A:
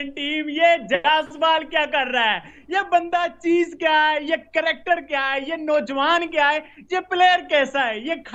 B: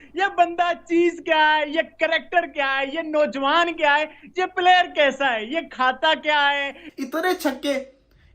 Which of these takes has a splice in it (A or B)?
B